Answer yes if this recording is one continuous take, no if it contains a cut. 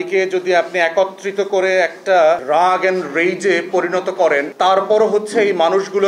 no